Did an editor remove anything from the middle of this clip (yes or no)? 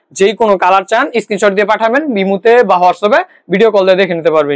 no